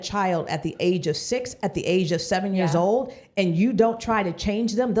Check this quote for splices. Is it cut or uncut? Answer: uncut